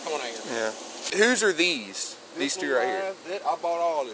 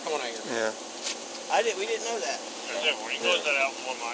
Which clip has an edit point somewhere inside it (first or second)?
first